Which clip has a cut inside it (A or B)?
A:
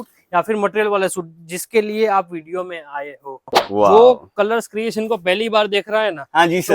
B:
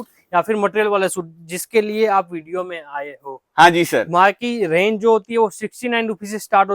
A